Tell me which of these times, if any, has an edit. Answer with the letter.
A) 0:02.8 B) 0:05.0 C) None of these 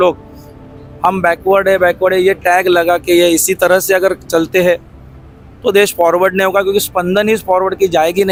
C